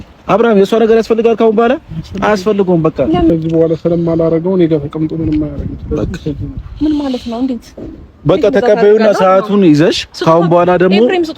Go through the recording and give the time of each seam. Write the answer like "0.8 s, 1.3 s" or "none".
3.3 s